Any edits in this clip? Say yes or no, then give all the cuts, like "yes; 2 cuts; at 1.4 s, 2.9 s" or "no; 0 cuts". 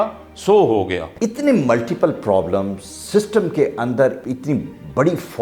yes; 2 cuts; at 1.0 s, 4.2 s